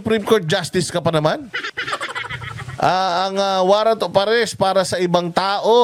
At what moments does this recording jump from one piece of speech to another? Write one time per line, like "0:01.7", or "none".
none